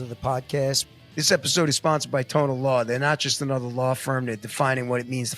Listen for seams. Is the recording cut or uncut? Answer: cut